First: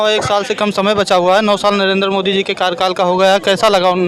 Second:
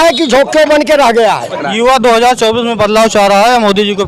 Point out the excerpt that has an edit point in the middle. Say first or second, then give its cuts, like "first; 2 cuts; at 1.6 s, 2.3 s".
second; 1 cut; at 1.6 s